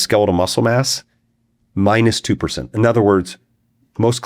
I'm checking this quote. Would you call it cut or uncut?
uncut